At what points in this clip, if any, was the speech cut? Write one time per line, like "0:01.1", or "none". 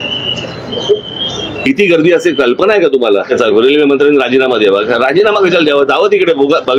0:03.4